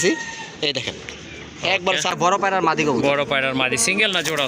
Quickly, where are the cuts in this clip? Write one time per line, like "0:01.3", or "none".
0:02.1